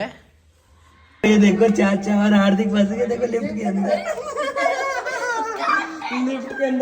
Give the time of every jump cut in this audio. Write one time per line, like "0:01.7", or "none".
0:01.0